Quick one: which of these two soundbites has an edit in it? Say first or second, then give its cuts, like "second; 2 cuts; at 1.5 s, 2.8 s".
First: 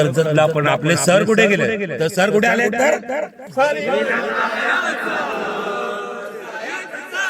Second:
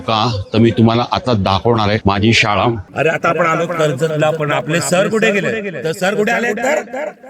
second; 1 cut; at 2.9 s